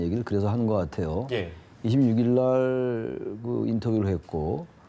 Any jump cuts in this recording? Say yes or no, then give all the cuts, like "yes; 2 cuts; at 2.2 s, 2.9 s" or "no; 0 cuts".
yes; 1 cut; at 2.7 s